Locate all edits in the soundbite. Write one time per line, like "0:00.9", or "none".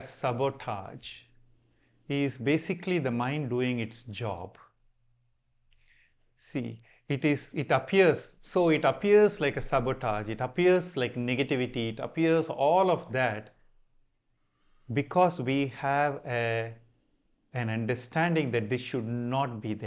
none